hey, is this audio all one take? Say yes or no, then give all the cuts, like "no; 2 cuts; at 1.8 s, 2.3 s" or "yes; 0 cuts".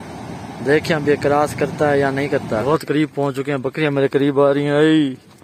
no; 1 cut; at 2.6 s